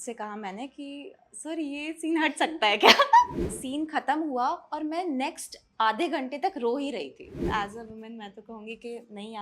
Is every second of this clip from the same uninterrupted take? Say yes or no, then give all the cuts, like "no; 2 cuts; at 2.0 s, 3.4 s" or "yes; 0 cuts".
no; 2 cuts; at 3.4 s, 7.4 s